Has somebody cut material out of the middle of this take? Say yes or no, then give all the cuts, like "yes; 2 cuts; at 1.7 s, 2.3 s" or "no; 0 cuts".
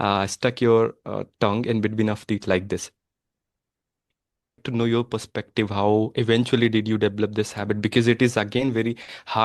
yes; 1 cut; at 4.6 s